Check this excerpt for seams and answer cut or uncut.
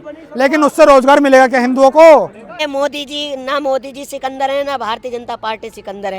cut